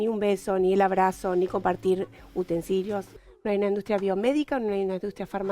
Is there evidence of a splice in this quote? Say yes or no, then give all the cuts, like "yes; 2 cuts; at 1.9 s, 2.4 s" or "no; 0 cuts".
yes; 1 cut; at 3.1 s